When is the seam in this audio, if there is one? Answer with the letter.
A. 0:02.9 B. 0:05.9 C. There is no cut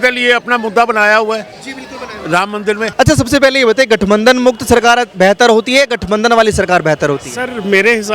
A